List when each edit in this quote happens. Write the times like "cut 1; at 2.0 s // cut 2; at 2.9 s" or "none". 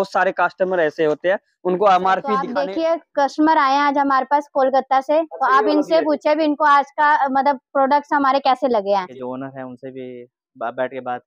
cut 1; at 2.6 s // cut 2; at 9.1 s